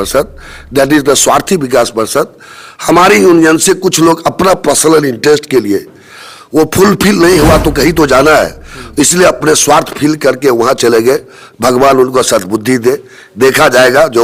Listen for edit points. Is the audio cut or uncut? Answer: uncut